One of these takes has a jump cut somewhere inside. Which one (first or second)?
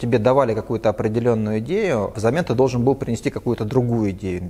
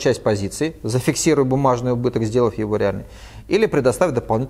first